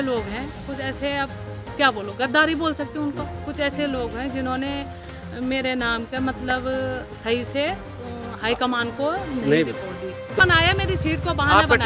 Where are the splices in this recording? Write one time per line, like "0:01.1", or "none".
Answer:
0:10.4